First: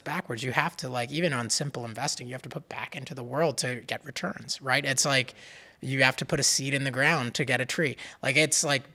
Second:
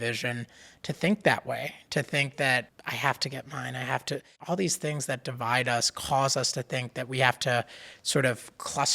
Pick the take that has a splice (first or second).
second